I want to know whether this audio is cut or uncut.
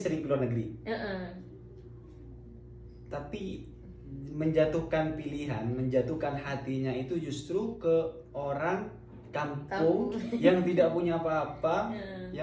uncut